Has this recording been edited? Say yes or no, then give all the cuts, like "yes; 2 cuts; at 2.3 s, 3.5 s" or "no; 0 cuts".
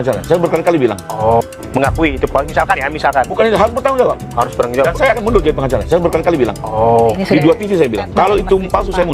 no; 0 cuts